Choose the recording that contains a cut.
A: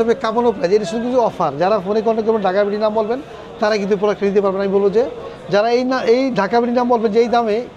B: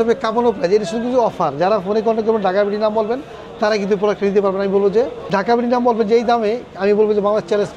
B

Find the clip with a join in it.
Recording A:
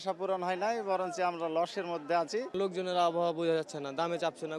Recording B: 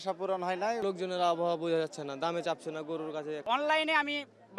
B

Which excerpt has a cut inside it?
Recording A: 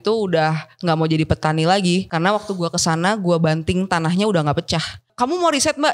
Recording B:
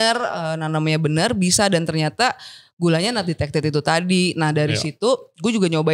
A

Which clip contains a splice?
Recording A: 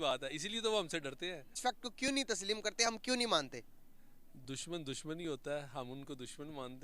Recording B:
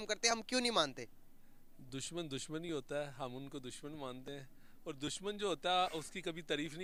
A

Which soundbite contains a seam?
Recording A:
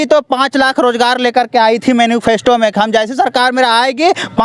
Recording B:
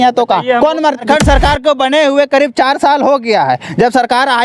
B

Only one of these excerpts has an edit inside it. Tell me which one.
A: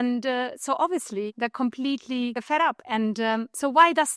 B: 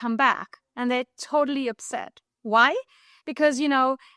A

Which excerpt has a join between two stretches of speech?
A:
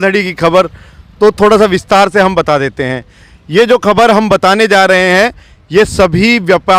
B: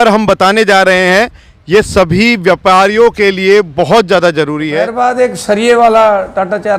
B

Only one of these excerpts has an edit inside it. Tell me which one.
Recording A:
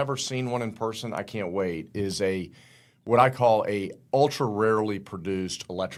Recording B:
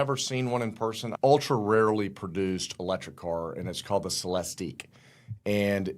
B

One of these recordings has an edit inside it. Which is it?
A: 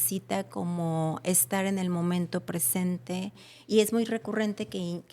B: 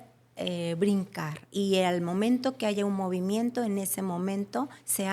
A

